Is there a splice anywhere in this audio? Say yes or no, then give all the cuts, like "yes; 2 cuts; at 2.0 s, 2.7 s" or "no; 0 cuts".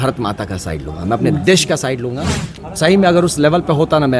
yes; 1 cut; at 2.7 s